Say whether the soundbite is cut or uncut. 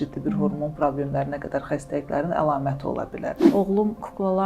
cut